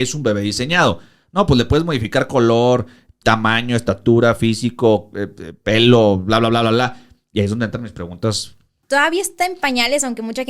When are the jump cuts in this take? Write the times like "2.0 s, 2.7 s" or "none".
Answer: 8.8 s